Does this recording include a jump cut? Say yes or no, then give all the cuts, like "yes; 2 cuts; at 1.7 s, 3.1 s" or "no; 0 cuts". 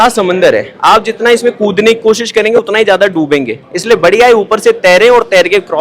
no; 0 cuts